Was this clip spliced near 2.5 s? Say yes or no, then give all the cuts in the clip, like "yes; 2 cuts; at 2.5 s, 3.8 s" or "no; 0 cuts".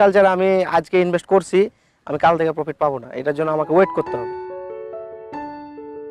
no; 1 cut; at 4.1 s